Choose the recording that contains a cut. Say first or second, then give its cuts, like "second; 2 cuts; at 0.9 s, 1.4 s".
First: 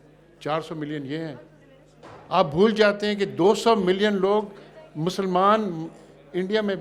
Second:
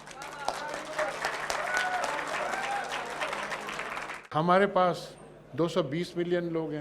second; 1 cut; at 4.3 s